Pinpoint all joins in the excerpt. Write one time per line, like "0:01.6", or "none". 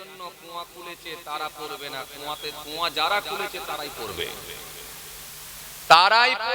none